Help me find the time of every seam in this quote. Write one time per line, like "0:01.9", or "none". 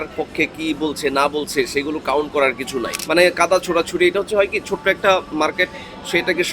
0:03.0